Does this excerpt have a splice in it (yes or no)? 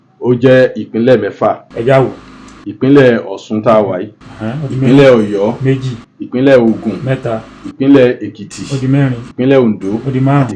no